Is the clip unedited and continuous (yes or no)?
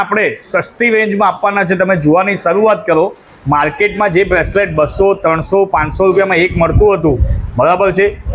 yes